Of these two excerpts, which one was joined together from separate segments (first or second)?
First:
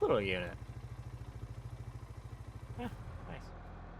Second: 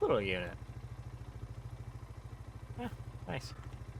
first